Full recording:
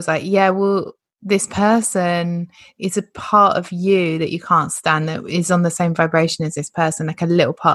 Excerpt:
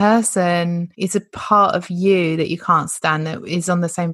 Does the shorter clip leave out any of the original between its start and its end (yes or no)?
yes